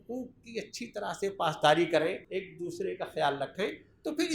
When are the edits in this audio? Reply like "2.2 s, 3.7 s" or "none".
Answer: 2.2 s